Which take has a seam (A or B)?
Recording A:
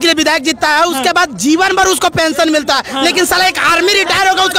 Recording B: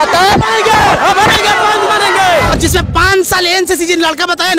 B